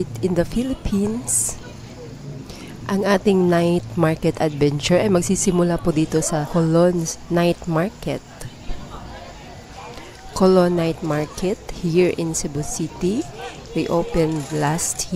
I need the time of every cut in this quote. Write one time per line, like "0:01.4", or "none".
none